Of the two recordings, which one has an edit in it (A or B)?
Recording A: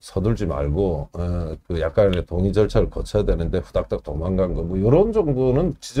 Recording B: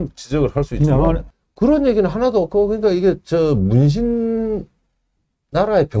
B